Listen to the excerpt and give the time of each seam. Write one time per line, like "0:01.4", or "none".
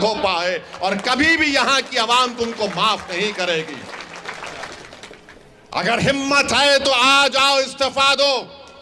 none